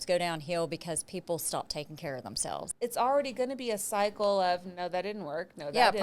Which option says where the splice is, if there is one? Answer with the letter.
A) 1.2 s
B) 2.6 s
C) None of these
B